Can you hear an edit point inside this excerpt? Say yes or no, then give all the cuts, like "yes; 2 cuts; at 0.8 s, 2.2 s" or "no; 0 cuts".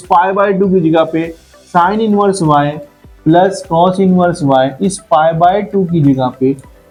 no; 0 cuts